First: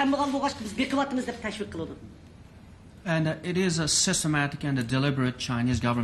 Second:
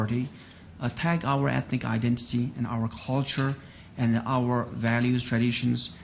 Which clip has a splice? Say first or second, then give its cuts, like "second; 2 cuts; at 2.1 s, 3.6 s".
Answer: second; 1 cut; at 3.8 s